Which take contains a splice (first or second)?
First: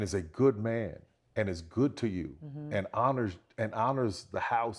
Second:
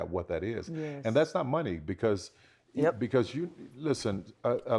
second